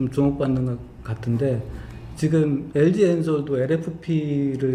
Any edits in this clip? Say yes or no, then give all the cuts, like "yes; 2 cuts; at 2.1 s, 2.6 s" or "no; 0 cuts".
no; 0 cuts